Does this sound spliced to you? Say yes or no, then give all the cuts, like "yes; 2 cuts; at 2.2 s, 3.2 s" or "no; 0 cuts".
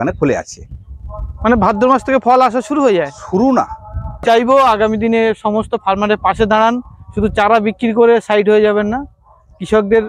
yes; 1 cut; at 4.2 s